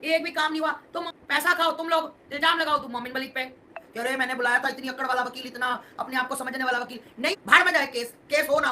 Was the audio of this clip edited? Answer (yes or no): yes